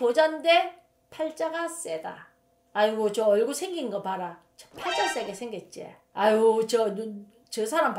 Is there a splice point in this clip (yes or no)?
no